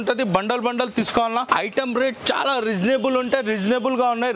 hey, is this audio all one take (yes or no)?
yes